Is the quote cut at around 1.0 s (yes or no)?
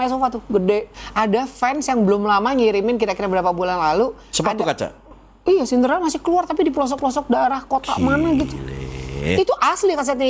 yes